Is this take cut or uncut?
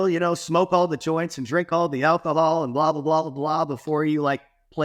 uncut